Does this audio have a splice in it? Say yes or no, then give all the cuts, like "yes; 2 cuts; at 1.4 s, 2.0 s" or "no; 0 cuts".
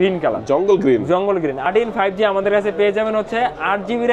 yes; 1 cut; at 1.6 s